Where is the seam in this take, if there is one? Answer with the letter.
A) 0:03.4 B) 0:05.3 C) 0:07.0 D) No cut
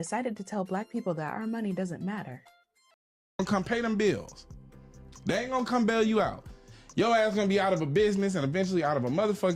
A